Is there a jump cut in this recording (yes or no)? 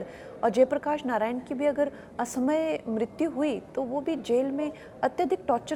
no